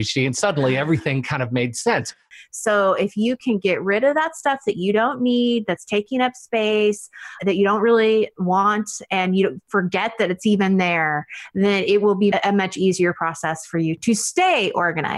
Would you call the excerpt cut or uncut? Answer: cut